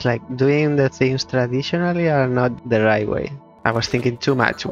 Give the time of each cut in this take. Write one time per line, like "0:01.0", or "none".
0:02.5
0:03.4